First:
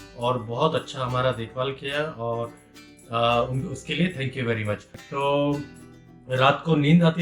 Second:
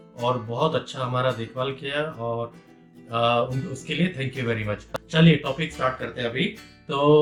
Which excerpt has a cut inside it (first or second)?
first